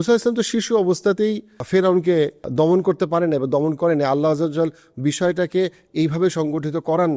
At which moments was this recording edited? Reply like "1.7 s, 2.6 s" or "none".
1.6 s, 2.4 s